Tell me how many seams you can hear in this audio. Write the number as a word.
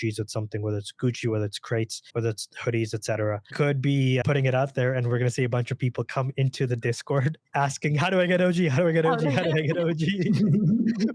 three